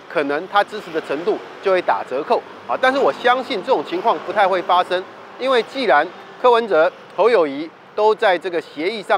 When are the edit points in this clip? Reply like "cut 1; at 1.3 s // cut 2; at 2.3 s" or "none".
none